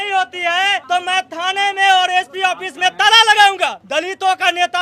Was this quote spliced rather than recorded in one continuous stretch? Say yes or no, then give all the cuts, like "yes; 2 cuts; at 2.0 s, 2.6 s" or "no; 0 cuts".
yes; 2 cuts; at 0.8 s, 3.8 s